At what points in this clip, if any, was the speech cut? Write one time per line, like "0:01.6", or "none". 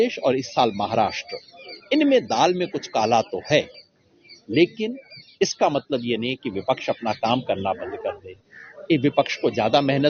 none

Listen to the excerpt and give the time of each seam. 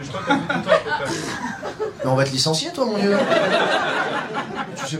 none

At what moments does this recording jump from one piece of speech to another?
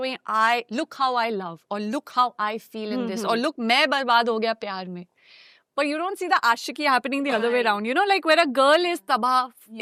none

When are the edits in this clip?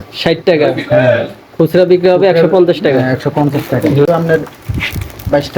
0:04.1

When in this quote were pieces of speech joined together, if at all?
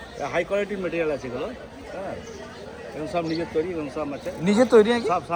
none

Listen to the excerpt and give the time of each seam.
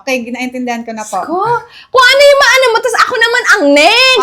none

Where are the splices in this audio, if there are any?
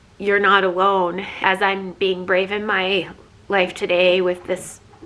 0:01.3

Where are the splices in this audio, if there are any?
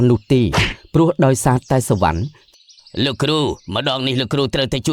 0:02.3

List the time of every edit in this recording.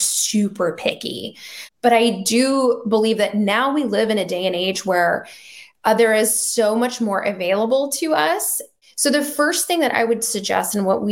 none

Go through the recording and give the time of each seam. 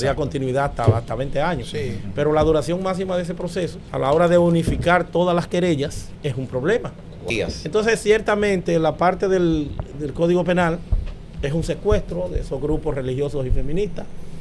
0:03.8
0:06.1
0:07.3

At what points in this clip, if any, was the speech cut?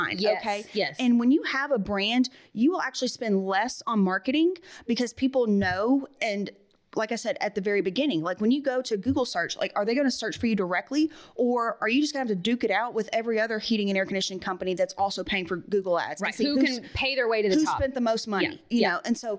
none

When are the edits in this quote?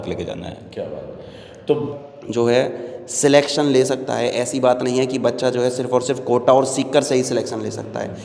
0:01.9

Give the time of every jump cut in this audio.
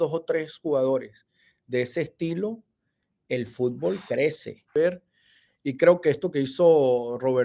0:04.7

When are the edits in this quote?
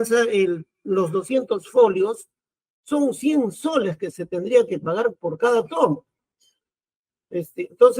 none

